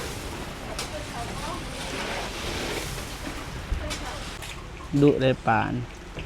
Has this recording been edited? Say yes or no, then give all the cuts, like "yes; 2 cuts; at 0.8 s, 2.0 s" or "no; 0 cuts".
yes; 1 cut; at 4.4 s